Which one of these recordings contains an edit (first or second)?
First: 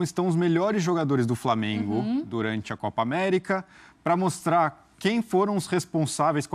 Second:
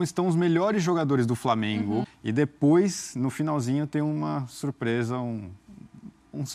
second